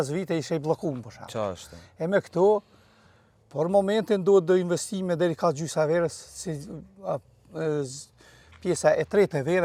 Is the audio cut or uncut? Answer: uncut